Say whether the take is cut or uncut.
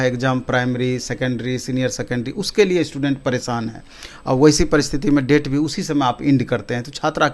uncut